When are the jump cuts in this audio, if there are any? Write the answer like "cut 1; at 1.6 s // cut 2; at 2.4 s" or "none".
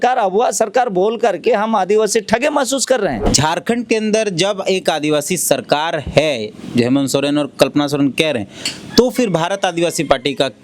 cut 1; at 3.2 s